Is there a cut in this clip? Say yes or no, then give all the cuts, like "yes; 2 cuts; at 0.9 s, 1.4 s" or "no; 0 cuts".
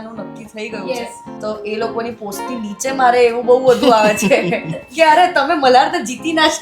yes; 1 cut; at 1.2 s